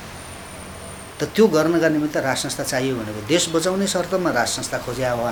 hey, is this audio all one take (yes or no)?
yes